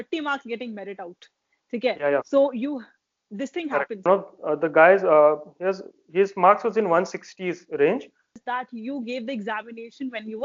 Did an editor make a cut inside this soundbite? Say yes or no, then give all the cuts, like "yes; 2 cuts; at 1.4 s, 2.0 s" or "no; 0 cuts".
yes; 2 cuts; at 4.0 s, 8.3 s